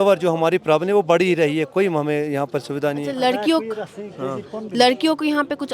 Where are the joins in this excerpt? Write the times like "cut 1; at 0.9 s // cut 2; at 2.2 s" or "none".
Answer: none